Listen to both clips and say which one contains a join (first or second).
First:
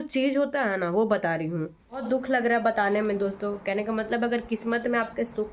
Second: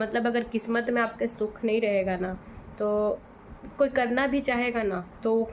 first